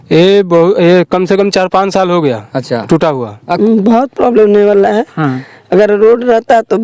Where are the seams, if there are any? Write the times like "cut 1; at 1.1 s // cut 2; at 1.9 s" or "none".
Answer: cut 1; at 3.5 s